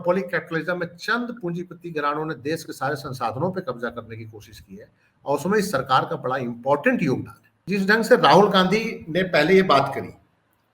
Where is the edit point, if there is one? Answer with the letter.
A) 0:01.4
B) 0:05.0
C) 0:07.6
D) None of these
C